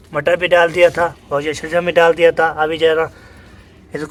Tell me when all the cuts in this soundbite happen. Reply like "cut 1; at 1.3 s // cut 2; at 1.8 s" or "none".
none